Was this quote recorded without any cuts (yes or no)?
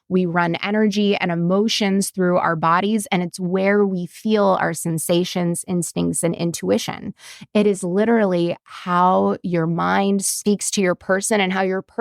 yes